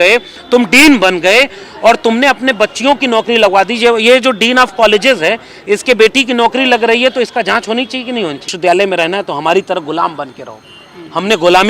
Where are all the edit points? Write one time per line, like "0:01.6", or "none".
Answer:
0:08.5

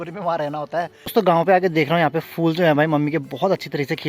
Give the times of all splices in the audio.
0:01.0

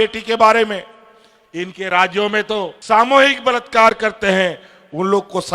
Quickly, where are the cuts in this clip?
0:02.7

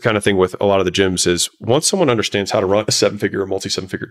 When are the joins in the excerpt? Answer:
none

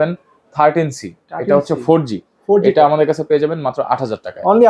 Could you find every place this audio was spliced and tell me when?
none

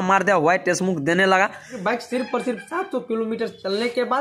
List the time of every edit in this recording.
0:01.8

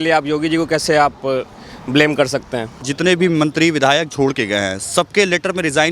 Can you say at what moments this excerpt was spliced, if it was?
0:02.9

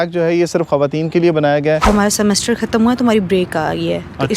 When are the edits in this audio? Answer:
0:01.8

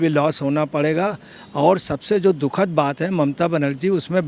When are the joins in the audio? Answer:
none

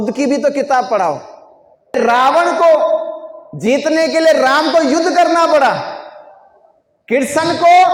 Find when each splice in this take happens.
0:02.0

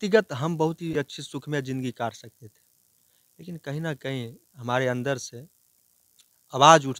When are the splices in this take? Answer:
0:00.9

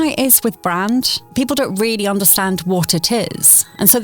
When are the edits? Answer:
0:01.2

